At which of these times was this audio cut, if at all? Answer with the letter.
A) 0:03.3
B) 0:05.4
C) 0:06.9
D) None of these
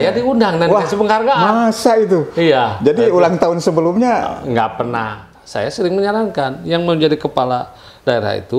B